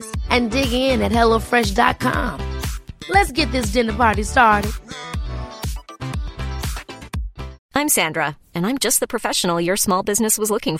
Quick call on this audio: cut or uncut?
cut